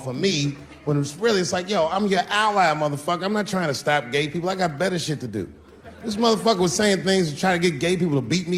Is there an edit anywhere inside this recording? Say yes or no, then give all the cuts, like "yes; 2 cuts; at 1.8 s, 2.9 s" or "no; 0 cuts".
no; 0 cuts